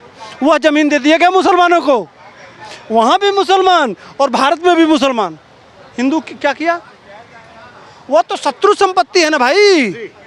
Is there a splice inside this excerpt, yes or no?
no